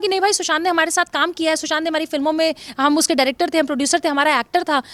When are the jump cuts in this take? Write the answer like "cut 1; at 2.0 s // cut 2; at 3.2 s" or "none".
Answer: none